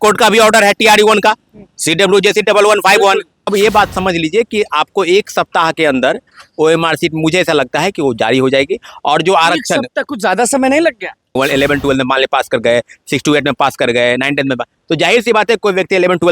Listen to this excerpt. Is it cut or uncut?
cut